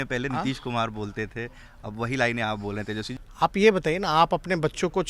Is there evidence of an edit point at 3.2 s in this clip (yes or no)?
yes